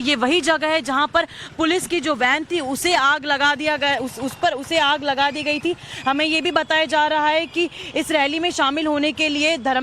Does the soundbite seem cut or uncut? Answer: cut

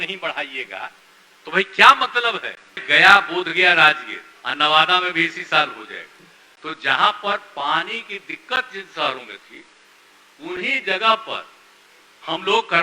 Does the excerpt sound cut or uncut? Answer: cut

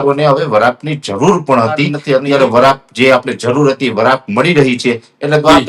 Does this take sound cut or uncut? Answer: cut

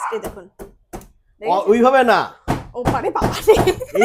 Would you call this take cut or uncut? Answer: uncut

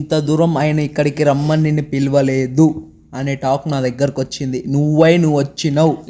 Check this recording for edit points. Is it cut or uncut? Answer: uncut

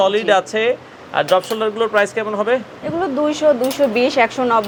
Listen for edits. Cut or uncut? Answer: uncut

